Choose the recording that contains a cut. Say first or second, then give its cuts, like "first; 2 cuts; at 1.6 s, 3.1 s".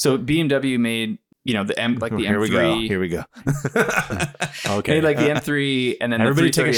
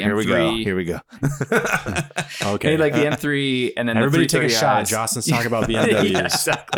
first; 1 cut; at 1.3 s